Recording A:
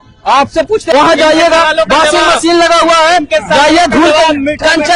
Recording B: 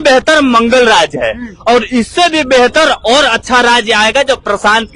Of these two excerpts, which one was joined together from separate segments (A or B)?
A